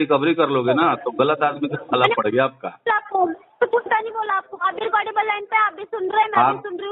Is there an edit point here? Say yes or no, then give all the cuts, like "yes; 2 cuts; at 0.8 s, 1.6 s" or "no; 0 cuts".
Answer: no; 0 cuts